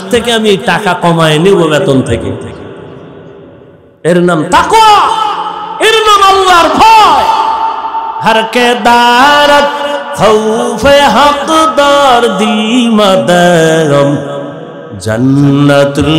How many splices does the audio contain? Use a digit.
1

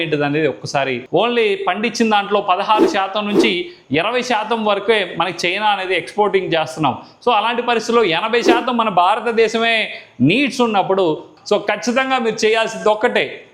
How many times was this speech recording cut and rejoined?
2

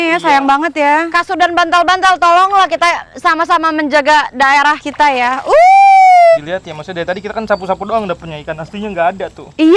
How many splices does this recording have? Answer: 2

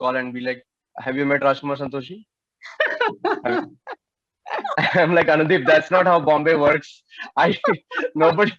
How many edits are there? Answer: 0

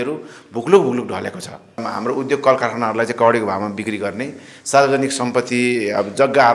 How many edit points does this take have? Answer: 1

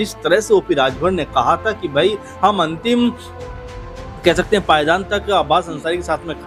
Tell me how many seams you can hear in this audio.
0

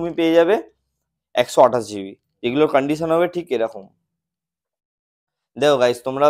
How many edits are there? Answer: 0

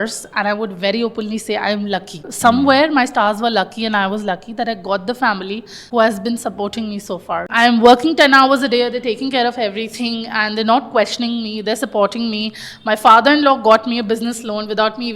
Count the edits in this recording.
3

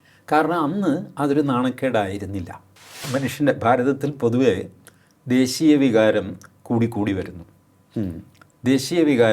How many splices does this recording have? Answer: 1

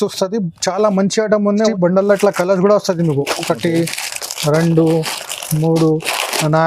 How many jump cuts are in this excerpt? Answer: 1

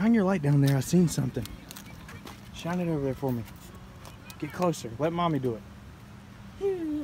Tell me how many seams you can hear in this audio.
0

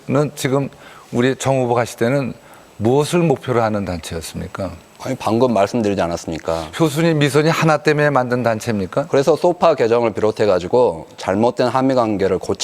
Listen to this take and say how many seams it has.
1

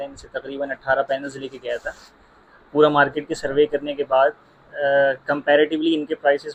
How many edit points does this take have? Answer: 0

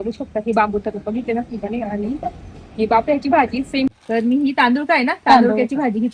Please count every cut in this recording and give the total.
1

